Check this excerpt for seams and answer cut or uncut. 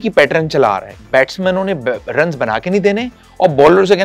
cut